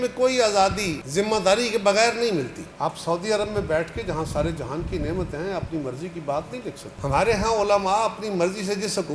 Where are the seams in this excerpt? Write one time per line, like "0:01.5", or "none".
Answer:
0:01.0
0:02.6
0:06.9